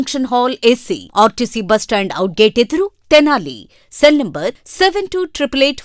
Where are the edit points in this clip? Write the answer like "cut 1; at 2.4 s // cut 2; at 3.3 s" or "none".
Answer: none